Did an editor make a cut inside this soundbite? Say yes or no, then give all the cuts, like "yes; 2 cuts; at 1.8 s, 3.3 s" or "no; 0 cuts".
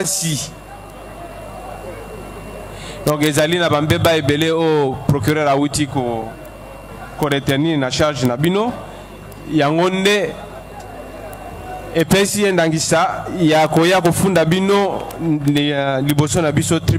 no; 0 cuts